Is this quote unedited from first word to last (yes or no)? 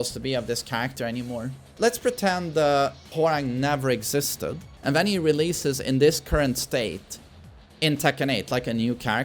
no